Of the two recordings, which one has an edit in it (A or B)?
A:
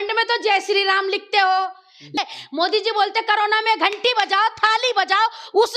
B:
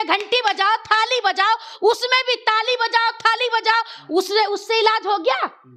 A